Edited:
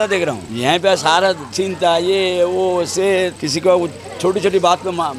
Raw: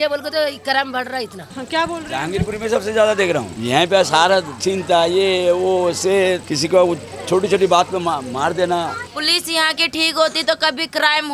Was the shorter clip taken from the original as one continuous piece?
yes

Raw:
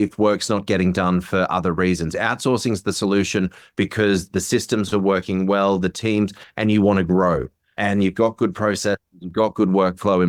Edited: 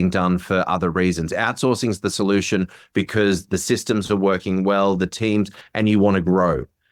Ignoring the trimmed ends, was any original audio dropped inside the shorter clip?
no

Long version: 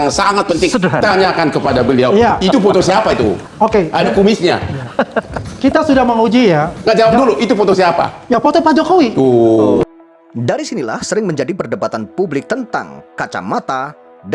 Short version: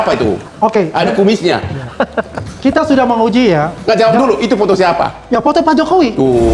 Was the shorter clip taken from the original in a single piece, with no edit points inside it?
yes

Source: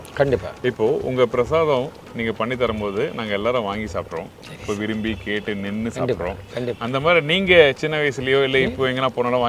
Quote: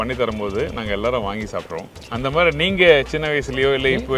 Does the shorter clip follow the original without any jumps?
no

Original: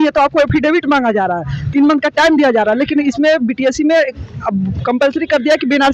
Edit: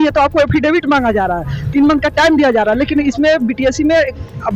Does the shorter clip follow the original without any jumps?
yes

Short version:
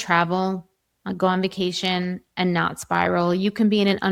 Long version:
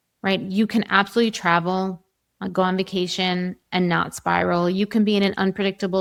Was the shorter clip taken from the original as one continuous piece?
yes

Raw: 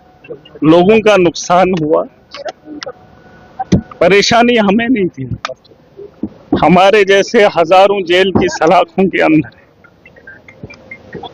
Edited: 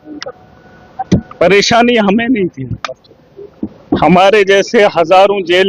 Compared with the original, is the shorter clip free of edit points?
yes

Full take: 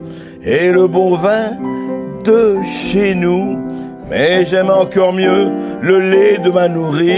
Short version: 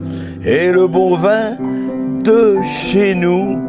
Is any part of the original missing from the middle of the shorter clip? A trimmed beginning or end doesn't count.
no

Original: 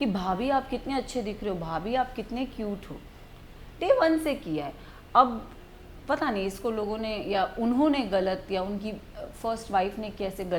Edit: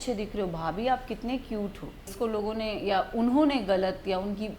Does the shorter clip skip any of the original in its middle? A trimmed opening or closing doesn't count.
yes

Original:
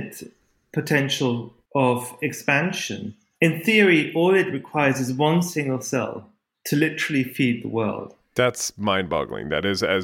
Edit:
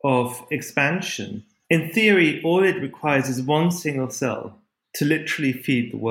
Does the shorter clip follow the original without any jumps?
yes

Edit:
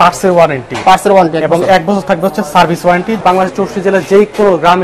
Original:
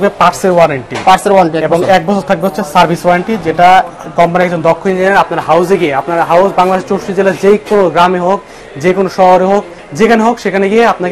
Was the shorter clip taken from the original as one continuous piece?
no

